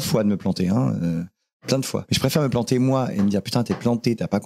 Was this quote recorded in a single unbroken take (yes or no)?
no